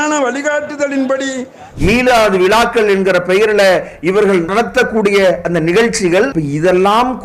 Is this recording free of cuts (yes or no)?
no